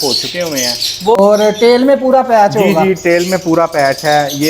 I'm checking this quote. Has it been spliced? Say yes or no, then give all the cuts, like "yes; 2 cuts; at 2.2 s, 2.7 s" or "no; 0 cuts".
yes; 1 cut; at 1.2 s